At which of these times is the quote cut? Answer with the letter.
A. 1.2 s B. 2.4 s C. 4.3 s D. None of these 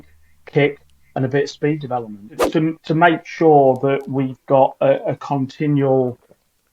B